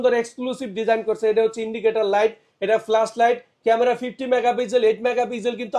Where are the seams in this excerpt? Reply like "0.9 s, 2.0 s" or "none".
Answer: none